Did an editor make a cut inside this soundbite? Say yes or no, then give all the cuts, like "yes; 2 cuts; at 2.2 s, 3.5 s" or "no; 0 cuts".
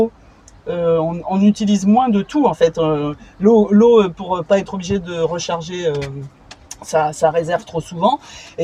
no; 0 cuts